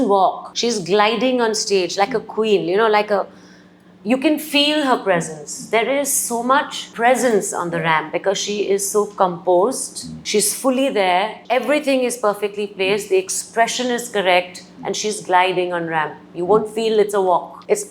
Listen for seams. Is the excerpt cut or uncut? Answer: uncut